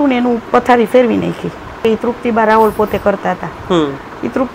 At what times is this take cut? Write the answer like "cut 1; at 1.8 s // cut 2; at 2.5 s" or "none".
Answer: cut 1; at 1.8 s